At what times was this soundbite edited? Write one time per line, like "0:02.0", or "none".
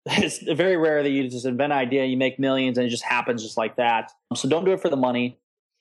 none

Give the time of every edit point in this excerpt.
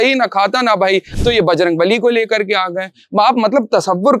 0:01.1

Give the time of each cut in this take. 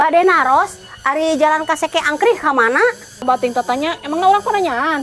0:03.2

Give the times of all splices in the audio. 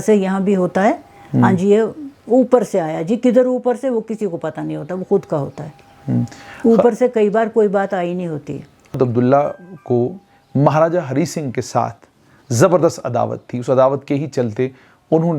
0:08.9

